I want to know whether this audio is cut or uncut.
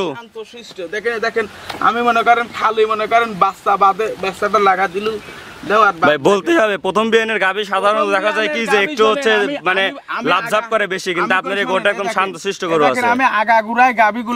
uncut